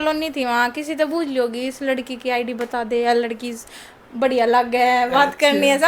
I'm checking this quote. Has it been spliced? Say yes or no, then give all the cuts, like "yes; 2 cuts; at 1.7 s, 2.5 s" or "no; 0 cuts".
no; 0 cuts